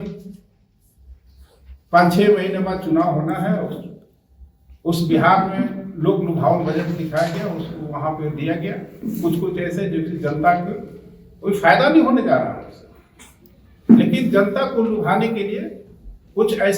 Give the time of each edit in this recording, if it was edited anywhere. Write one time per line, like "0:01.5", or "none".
none

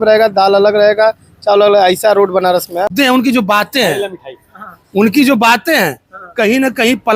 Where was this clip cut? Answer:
0:02.9

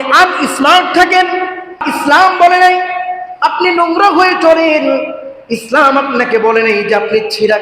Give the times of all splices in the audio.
0:01.8

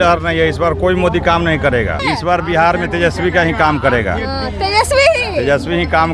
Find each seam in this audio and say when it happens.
0:02.0

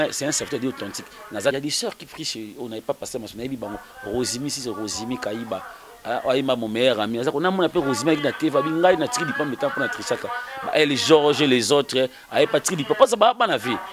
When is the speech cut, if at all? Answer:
0:01.5

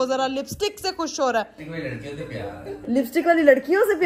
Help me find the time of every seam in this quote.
none

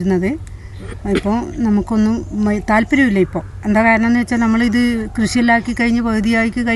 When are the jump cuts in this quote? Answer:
none

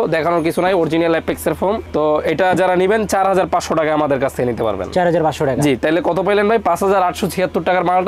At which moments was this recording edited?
none

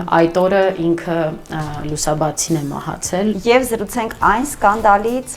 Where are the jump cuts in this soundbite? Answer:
0:03.3

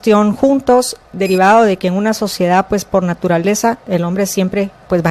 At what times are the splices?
0:01.1

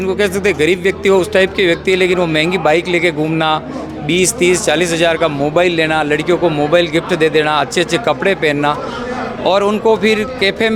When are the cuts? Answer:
none

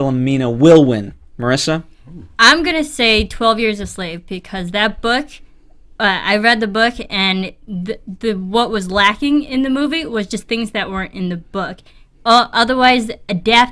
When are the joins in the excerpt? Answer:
0:09.2

